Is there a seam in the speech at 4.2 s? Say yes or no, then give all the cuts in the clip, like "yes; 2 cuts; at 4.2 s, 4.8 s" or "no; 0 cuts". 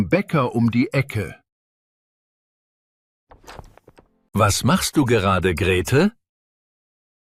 no; 0 cuts